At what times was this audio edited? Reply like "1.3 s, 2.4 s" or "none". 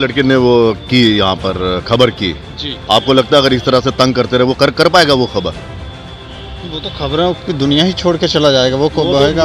none